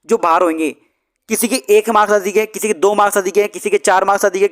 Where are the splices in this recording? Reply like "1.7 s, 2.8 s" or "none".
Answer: none